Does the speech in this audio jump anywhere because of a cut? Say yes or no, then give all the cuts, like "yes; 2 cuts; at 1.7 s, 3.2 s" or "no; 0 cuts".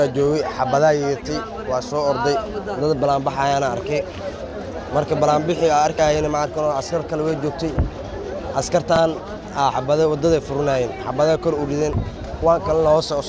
no; 0 cuts